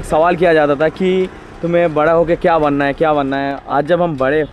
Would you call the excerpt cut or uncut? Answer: cut